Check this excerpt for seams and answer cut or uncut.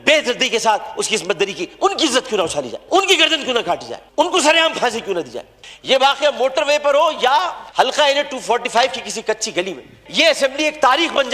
cut